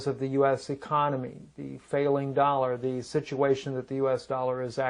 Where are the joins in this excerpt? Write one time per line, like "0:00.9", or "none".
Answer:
0:02.2